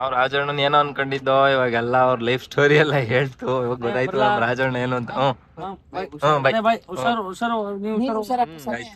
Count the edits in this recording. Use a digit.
1